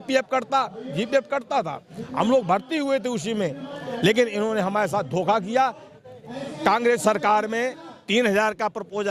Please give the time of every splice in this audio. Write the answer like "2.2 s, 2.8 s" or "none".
5.9 s